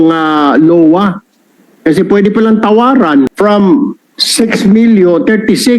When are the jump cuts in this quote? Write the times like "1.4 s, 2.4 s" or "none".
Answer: 3.3 s